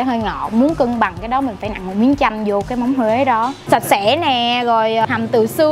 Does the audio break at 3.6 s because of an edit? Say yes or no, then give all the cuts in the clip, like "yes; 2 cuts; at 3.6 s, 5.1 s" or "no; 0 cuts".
yes; 2 cuts; at 3.6 s, 5.0 s